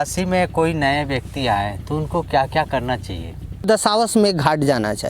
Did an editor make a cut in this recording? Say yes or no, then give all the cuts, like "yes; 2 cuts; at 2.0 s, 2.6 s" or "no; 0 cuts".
yes; 1 cut; at 3.6 s